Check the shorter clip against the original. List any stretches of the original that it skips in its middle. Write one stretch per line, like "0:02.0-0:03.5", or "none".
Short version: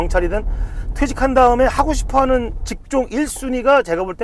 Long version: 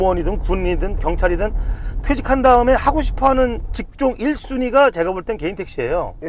none